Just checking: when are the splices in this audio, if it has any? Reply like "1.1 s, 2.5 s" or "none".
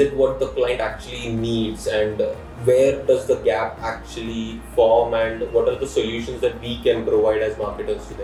none